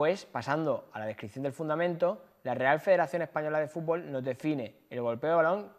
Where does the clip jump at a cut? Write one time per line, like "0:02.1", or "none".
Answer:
0:02.3